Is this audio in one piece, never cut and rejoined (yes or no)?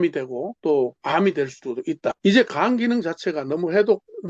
no